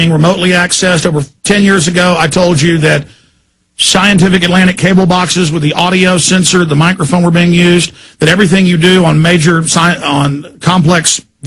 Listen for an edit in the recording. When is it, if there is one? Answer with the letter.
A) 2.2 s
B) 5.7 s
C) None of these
C